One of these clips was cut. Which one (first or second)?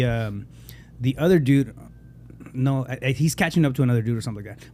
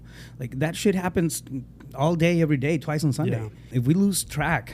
second